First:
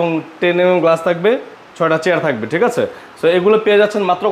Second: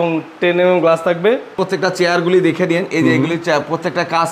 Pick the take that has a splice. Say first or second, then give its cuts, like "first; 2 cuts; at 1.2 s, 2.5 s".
second; 1 cut; at 1.6 s